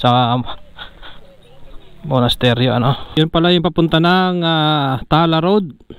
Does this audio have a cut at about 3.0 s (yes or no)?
yes